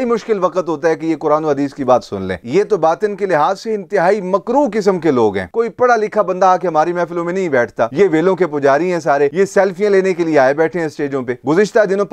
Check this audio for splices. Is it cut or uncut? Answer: cut